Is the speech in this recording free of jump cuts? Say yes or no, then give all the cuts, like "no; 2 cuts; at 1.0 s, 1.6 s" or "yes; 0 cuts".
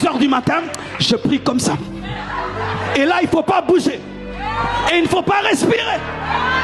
yes; 0 cuts